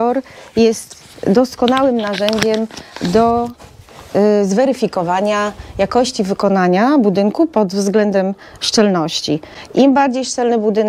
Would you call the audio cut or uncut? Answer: uncut